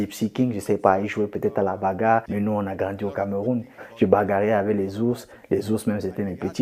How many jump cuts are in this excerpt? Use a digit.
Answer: 2